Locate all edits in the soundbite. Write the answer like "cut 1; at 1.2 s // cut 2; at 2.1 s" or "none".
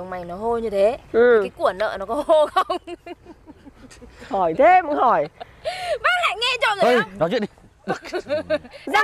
none

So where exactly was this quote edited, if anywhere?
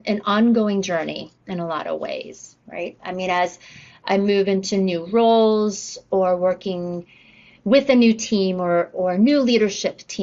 none

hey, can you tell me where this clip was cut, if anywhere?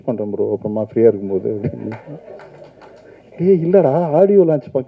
none

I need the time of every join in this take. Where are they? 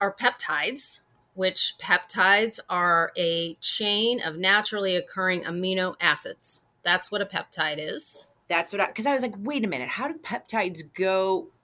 none

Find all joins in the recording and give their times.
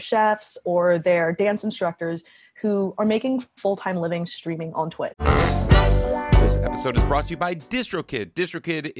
cut 1; at 5.2 s

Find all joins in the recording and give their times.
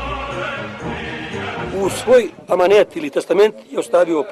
cut 1; at 1.7 s

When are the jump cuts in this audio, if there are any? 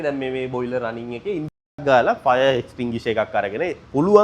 cut 1; at 1.8 s

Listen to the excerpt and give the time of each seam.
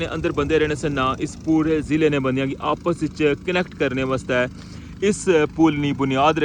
none

